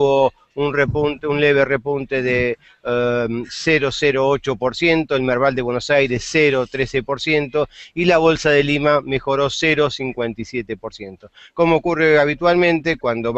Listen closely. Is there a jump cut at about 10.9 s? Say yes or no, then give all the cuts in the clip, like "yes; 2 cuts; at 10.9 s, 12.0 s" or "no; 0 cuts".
no; 0 cuts